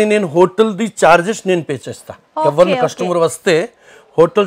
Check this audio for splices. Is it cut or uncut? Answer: uncut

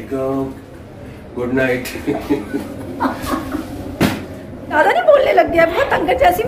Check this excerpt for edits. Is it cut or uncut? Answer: cut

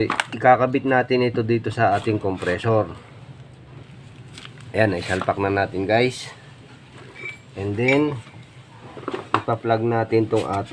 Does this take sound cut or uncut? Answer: cut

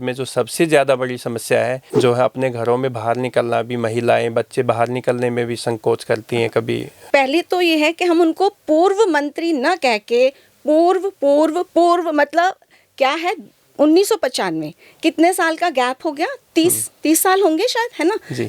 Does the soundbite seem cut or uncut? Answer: cut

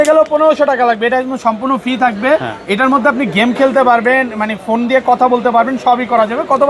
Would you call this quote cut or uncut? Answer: uncut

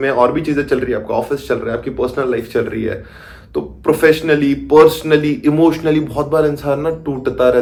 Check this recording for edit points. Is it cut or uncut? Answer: uncut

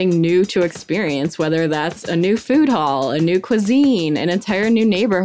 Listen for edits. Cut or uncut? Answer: uncut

